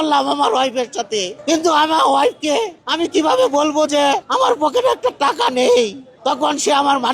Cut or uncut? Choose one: cut